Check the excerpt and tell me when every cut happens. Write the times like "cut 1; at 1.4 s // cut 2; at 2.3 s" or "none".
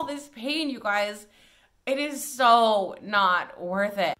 none